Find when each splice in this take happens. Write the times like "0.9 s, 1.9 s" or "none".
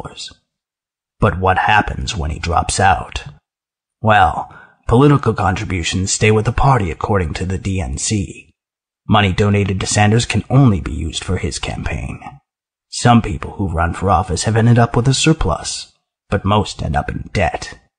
4.4 s